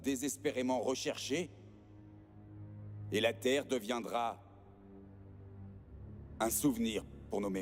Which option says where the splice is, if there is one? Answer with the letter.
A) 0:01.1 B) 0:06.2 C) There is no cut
B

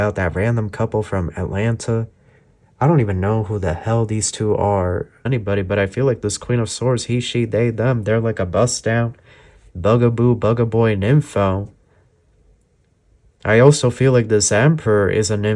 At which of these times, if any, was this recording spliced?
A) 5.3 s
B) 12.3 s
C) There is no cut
A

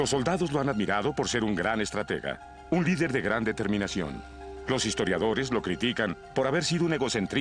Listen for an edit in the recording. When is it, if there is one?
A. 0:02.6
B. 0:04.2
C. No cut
B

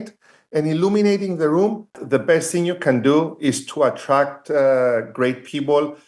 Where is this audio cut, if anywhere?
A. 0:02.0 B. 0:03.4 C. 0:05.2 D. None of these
A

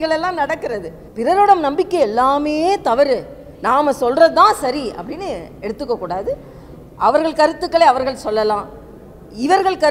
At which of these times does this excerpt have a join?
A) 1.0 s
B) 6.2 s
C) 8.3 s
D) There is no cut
A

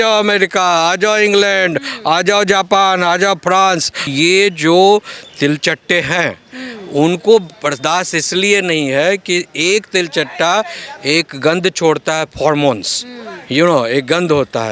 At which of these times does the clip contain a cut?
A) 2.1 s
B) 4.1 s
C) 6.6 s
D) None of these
B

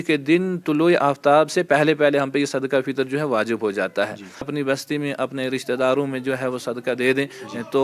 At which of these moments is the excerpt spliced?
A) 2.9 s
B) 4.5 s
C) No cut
B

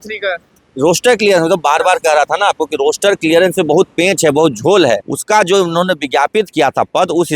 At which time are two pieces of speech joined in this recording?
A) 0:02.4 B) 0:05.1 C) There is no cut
B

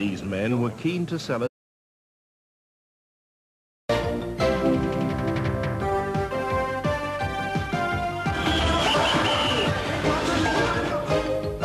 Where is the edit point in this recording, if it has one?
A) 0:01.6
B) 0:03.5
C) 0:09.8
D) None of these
D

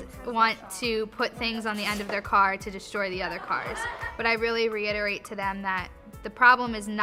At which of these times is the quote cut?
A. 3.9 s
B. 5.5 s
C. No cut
C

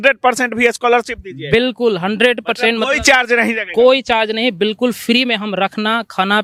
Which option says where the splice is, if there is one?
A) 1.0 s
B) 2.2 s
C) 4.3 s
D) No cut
D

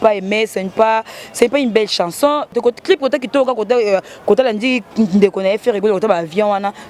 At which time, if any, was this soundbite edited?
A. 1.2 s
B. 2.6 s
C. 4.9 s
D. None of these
B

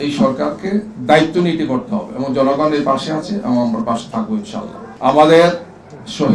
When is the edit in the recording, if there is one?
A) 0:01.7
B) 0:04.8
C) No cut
B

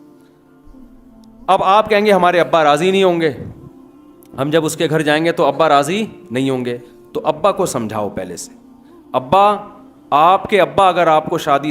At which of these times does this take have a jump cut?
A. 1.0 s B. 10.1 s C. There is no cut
A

